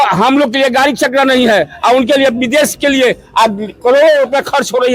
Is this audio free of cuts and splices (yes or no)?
yes